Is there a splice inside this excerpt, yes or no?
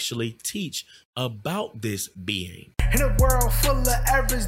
yes